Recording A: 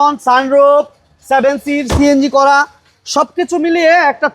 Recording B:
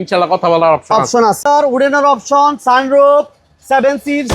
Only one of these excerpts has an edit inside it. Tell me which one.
B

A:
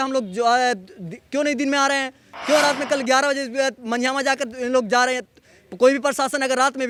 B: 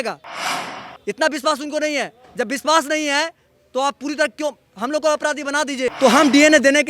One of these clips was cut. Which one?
B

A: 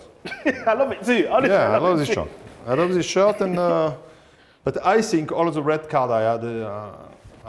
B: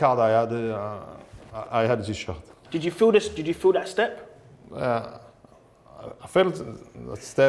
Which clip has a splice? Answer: B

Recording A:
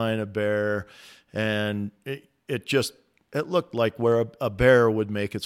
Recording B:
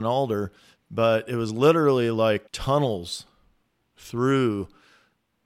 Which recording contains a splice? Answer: B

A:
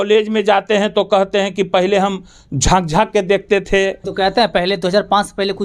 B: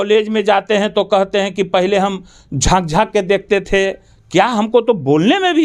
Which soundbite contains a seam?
A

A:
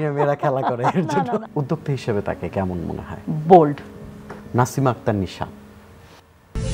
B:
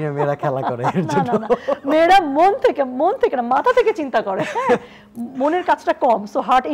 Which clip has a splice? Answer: A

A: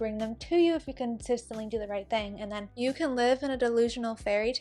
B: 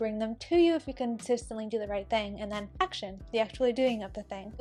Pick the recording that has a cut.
A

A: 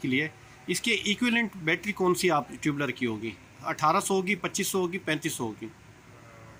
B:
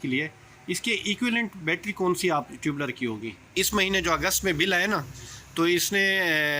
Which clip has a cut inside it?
B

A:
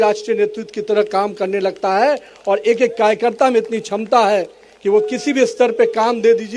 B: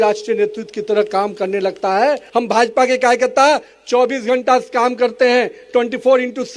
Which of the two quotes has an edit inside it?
B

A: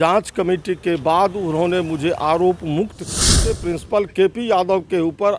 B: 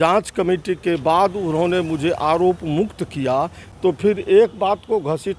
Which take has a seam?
A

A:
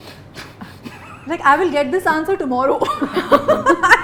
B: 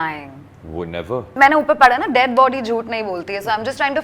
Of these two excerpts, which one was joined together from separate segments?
B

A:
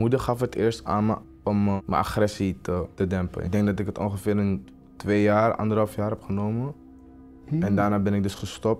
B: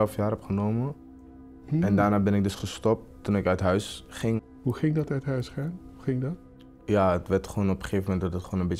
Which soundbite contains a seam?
A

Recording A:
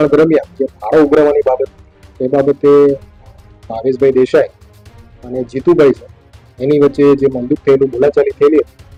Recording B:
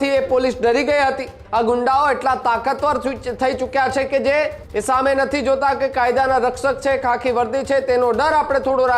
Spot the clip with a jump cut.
B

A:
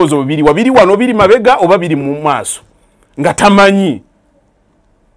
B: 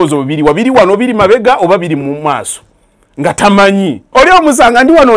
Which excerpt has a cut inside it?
B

